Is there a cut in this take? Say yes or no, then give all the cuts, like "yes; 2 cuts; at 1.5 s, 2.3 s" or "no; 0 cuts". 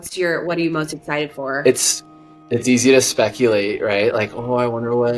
no; 0 cuts